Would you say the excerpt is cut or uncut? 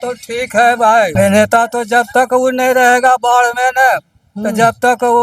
cut